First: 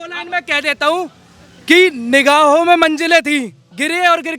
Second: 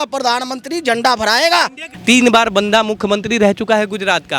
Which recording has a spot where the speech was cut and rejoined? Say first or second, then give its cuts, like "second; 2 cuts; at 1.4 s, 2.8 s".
second; 1 cut; at 1.9 s